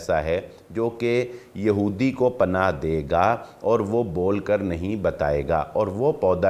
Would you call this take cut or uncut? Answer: uncut